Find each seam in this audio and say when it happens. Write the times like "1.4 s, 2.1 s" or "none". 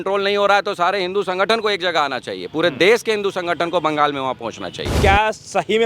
4.9 s